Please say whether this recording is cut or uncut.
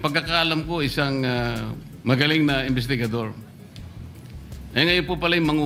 uncut